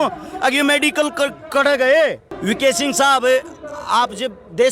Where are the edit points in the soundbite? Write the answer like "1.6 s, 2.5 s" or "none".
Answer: 2.3 s